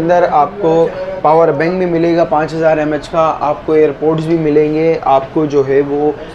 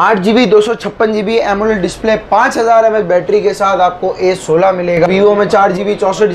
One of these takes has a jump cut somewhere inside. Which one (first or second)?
second